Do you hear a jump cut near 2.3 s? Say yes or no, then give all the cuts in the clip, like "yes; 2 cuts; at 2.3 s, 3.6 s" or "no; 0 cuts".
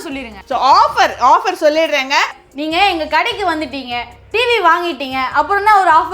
yes; 1 cut; at 2.3 s